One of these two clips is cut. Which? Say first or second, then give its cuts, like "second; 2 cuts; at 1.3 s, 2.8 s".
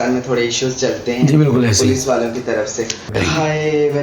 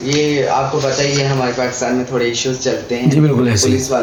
first; 1 cut; at 3.1 s